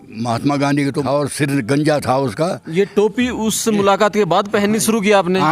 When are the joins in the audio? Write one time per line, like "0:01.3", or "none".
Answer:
0:01.0